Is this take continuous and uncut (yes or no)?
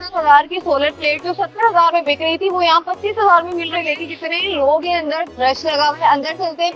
no